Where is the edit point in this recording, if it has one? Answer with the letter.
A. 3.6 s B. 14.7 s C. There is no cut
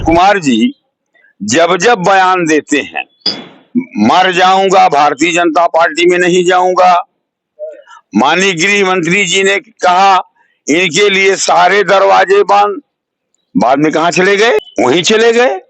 B